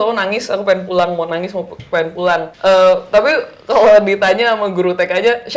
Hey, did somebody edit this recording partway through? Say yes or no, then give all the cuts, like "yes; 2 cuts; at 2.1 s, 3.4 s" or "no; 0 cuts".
yes; 1 cut; at 2.5 s